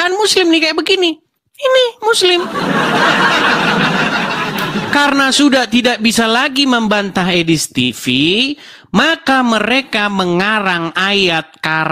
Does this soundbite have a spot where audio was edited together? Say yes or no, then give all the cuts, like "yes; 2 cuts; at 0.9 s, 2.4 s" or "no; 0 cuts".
no; 0 cuts